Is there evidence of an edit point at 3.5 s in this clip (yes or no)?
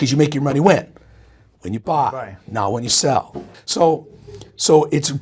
yes